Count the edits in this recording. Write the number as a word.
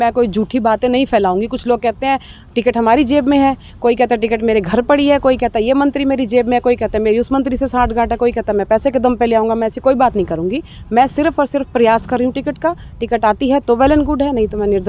zero